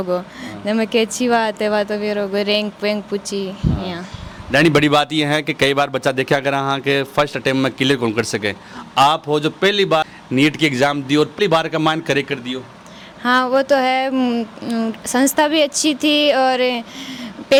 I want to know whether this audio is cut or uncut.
uncut